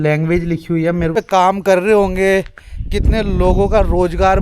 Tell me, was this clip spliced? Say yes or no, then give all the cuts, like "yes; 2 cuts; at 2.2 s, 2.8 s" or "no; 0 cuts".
yes; 1 cut; at 1.2 s